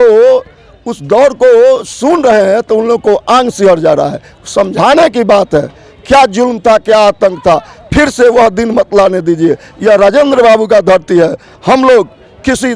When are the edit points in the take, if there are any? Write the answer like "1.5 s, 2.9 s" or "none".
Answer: none